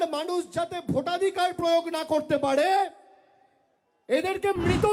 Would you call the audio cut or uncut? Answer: uncut